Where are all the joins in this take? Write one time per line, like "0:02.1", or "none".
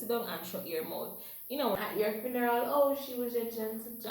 0:01.7